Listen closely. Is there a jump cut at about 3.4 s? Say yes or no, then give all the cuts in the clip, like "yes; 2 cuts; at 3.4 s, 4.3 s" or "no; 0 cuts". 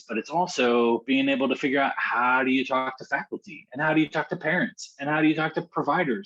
no; 1 cut; at 1.0 s